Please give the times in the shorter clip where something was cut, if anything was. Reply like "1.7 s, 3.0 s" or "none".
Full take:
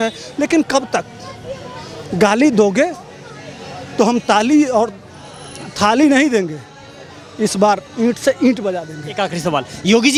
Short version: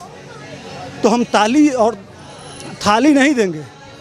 none